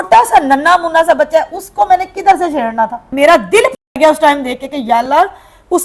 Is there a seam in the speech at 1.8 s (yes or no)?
no